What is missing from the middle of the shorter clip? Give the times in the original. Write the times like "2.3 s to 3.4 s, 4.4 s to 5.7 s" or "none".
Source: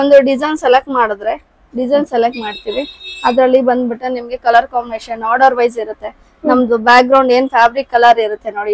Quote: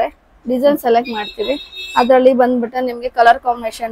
none